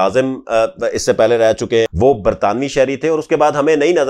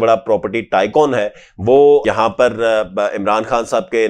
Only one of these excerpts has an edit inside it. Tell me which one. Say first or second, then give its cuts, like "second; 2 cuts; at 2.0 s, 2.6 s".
first; 1 cut; at 1.9 s